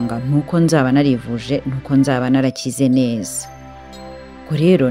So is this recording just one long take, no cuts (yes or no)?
yes